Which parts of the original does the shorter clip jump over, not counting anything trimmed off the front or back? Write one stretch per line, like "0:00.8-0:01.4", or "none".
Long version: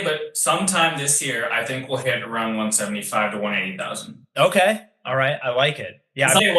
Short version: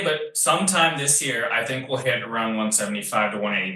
none